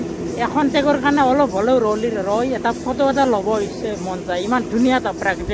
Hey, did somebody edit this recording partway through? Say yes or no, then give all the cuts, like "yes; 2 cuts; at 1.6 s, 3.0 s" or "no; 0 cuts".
no; 0 cuts